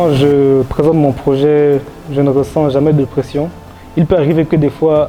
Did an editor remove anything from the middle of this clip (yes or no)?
no